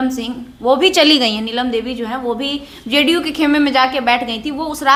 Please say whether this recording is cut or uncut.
uncut